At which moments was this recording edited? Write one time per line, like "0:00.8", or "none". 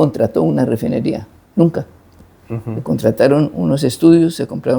none